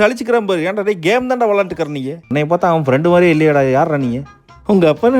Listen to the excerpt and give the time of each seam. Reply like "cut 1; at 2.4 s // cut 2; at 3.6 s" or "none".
cut 1; at 2.2 s